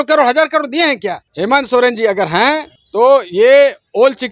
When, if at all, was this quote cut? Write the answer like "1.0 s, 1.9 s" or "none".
1.3 s, 2.8 s

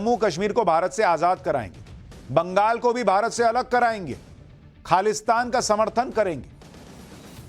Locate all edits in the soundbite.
1.3 s

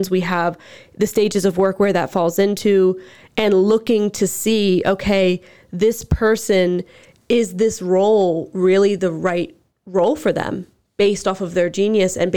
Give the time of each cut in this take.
none

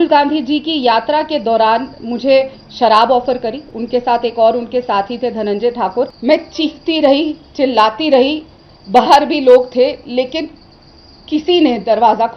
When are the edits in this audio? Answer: 6.1 s

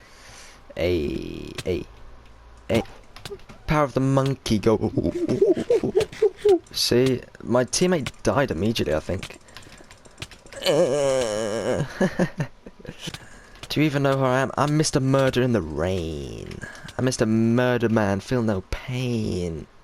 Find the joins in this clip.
2.9 s, 13.1 s

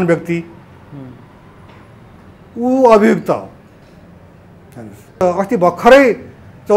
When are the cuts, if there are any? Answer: 5.2 s

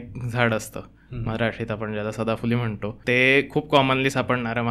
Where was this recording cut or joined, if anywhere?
2.9 s

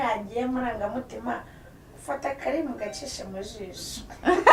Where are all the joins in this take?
none

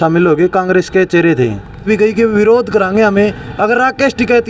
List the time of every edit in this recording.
1.8 s

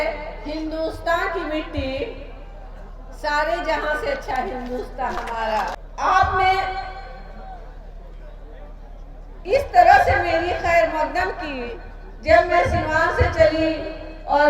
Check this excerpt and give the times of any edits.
5.8 s

